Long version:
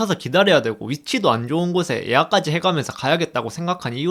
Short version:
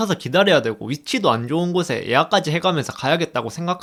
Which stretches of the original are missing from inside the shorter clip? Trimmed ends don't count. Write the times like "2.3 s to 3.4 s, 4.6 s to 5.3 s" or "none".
none